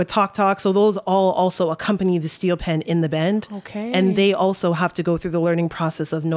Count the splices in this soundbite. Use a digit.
0